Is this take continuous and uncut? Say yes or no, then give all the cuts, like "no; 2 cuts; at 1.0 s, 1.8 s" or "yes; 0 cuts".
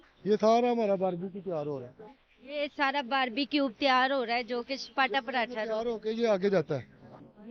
yes; 0 cuts